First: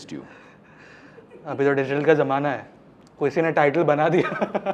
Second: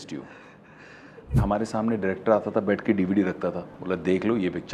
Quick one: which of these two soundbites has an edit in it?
second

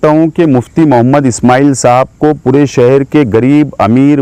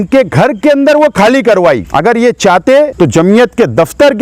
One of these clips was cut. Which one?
second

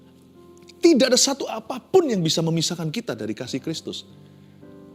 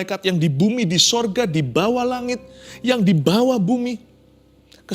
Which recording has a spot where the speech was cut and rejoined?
second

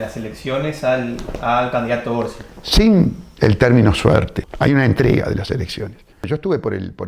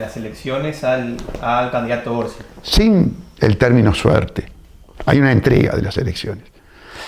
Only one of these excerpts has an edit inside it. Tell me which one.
first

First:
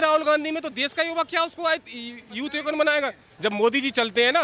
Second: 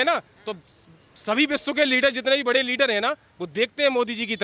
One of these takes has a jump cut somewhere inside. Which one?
first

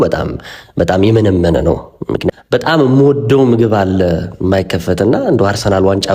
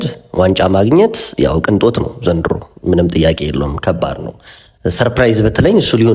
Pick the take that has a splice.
first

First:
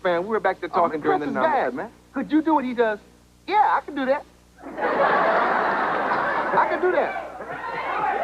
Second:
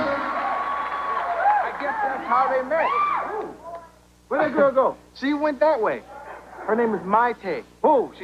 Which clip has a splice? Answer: first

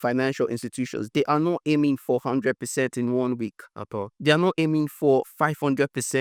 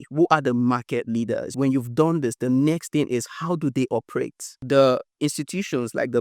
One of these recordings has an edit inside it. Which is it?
second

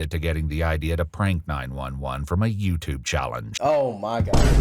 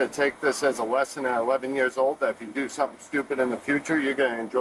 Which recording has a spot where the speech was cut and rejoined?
first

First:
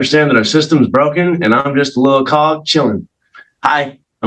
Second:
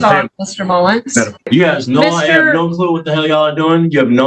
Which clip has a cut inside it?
second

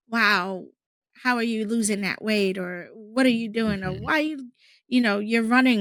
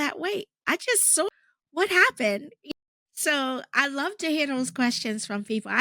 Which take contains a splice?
second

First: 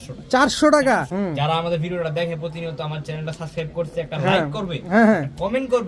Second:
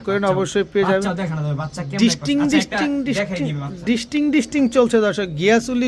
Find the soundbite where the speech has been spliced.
first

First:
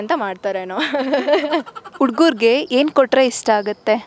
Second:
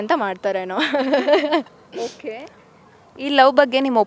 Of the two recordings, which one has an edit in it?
first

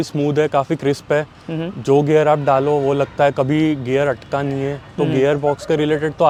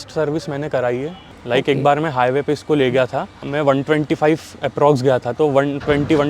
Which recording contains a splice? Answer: second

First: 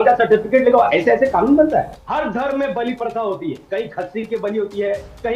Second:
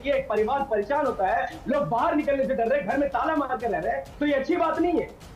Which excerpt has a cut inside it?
first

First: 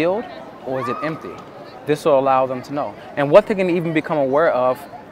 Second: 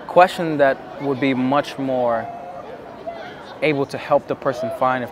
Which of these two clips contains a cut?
first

